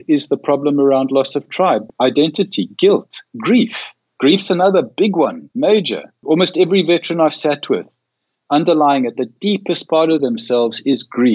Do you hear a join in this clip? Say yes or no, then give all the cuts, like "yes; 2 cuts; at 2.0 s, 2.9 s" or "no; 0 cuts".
yes; 3 cuts; at 1.9 s, 5.4 s, 6.2 s